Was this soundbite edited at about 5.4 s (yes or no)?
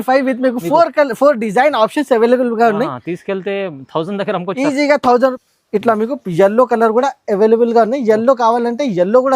yes